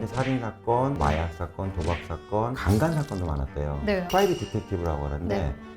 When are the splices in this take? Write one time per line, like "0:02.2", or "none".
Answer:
0:04.1